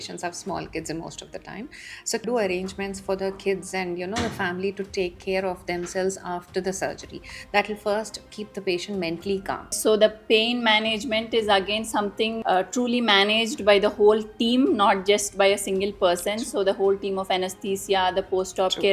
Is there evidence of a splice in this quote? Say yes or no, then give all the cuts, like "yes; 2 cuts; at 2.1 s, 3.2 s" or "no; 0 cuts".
yes; 1 cut; at 9.8 s